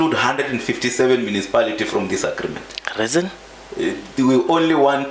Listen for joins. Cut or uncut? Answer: uncut